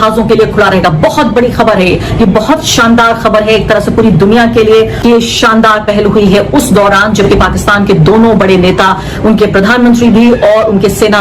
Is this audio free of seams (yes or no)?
no